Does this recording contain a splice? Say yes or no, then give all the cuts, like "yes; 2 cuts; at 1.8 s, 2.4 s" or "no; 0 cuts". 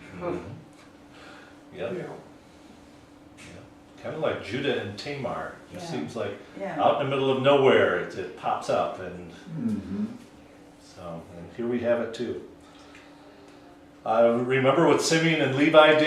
yes; 1 cut; at 4.9 s